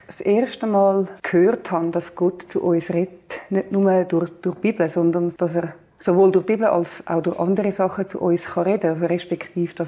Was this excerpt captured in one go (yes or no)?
no